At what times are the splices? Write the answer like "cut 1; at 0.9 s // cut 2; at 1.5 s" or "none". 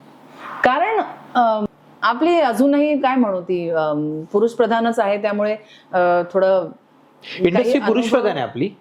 cut 1; at 1.6 s

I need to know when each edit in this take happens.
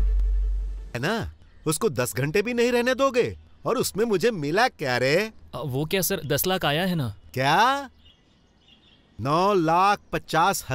cut 1; at 1.0 s

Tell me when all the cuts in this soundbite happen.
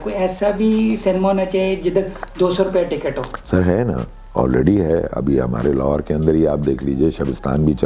none

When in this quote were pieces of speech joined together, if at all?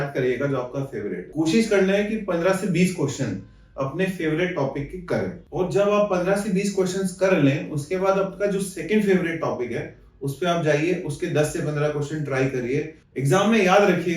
cut 1; at 1.2 s // cut 2; at 5.4 s // cut 3; at 13.0 s

